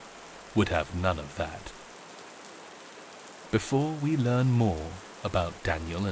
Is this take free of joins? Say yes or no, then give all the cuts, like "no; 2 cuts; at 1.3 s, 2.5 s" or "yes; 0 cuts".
no; 2 cuts; at 1.6 s, 3.5 s